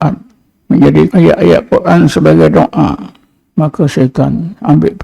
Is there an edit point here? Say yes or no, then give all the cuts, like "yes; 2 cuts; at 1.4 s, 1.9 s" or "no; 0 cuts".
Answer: yes; 1 cut; at 1.1 s